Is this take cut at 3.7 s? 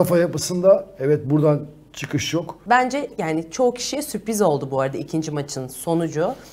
no; 1 cut; at 2.5 s

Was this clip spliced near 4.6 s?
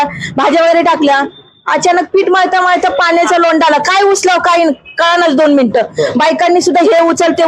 no; 0 cuts

